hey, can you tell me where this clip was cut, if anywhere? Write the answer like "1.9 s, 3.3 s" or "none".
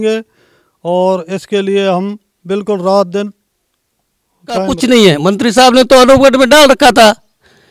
4.7 s